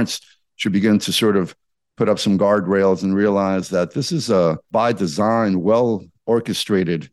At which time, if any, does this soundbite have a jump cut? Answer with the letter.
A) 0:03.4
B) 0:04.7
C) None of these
B